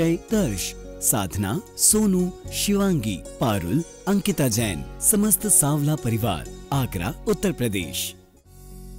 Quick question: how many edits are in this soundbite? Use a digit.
1